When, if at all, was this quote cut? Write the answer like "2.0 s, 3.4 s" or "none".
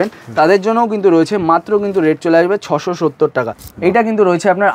3.6 s